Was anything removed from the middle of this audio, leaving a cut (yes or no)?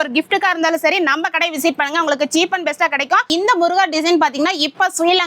yes